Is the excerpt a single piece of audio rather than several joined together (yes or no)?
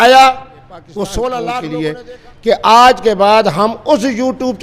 no